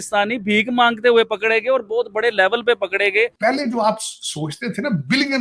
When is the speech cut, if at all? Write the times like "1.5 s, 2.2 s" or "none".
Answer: 3.3 s